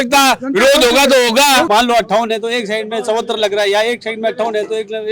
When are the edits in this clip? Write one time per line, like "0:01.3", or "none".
0:01.7